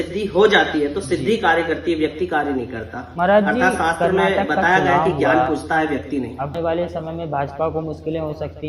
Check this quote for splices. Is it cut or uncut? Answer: cut